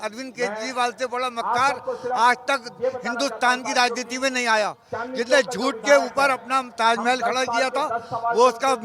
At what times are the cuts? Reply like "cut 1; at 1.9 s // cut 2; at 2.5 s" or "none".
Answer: none